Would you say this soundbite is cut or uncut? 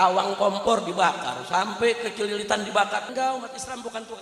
cut